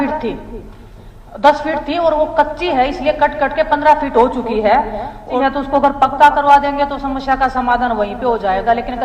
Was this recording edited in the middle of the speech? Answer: yes; 1 cut; at 5.3 s

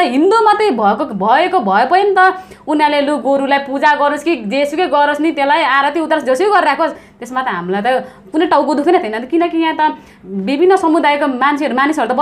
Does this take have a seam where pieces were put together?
no; 0 cuts

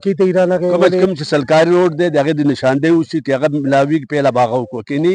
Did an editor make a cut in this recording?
yes; 1 cut; at 1.0 s

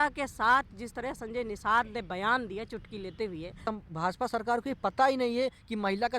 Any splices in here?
yes; 1 cut; at 3.6 s

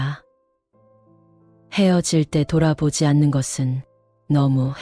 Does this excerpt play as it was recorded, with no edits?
yes; 0 cuts

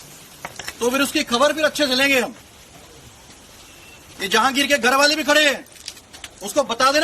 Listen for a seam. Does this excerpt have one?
yes; 1 cut; at 5.0 s

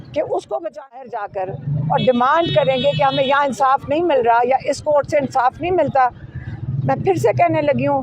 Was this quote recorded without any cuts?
no; 1 cut; at 1.1 s

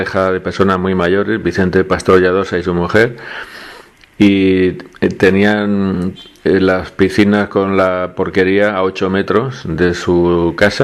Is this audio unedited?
no; 1 cut; at 2.5 s

